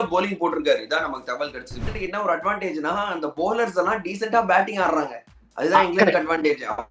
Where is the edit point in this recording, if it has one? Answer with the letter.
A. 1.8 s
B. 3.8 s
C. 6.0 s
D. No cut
A